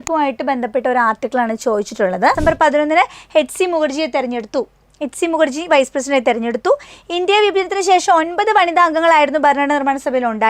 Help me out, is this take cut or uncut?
cut